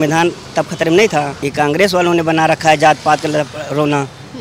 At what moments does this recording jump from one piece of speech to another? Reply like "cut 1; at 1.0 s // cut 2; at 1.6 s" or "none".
cut 1; at 1.4 s